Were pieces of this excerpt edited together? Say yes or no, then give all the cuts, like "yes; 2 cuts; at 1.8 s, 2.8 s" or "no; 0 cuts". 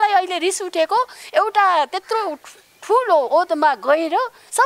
no; 0 cuts